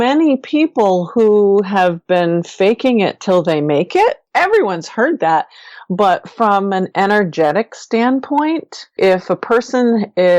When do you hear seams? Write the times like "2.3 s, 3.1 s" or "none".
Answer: 4.2 s, 8.9 s